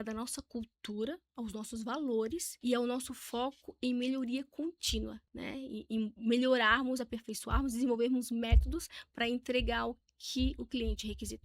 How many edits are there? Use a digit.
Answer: 2